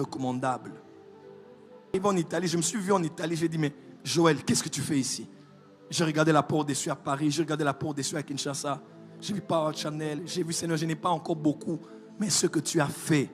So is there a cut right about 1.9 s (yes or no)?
yes